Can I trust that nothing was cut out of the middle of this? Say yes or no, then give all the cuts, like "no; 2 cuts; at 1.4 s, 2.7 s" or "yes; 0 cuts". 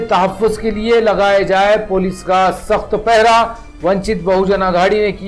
yes; 0 cuts